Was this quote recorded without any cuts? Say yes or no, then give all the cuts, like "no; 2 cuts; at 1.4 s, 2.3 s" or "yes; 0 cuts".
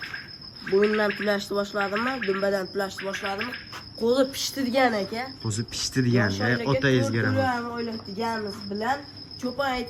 yes; 0 cuts